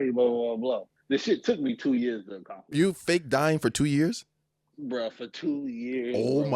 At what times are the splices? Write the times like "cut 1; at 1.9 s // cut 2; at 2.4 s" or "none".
cut 1; at 0.9 s // cut 2; at 2.6 s